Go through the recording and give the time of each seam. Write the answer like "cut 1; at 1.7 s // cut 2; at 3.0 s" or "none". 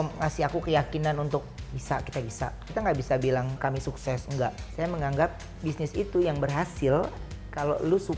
cut 1; at 2.6 s // cut 2; at 3.6 s // cut 3; at 4.6 s